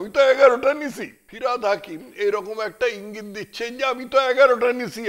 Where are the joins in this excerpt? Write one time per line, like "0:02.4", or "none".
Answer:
0:01.3